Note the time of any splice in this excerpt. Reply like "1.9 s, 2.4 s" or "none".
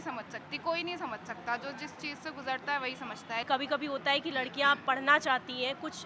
3.4 s